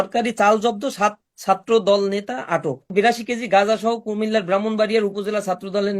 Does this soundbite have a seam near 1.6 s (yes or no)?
no